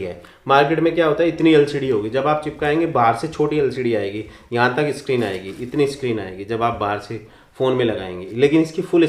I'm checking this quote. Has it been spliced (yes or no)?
no